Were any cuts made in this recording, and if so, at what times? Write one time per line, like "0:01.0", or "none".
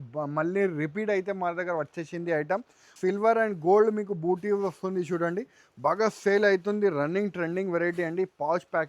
0:02.9